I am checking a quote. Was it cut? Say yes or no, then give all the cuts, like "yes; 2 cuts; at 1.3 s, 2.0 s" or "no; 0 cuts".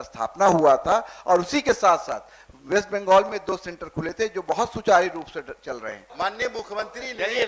yes; 1 cut; at 6.0 s